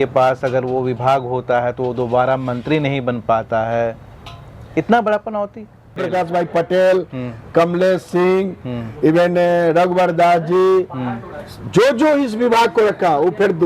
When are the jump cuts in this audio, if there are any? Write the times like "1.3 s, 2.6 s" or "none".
6.0 s